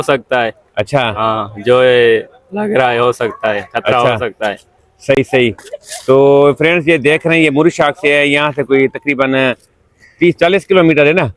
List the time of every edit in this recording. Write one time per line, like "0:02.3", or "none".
none